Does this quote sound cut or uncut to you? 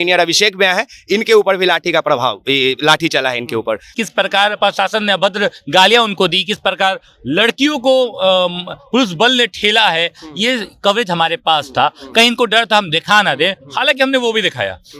cut